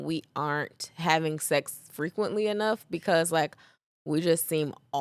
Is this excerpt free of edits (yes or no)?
yes